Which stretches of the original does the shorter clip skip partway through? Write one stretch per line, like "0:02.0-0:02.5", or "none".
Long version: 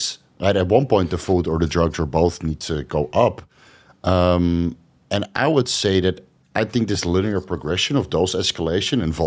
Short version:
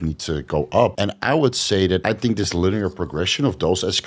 0:03.4-0:05.1
0:06.2-0:06.5